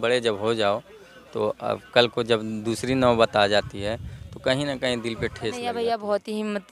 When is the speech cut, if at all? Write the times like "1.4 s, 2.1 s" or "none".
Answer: 5.6 s